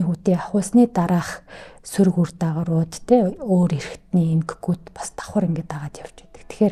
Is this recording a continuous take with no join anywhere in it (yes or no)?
yes